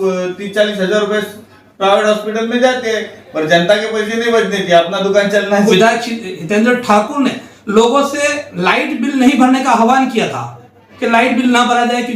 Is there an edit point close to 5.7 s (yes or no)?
yes